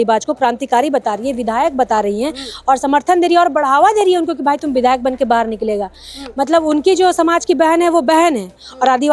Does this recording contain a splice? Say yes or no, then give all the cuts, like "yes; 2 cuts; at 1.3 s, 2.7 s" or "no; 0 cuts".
no; 0 cuts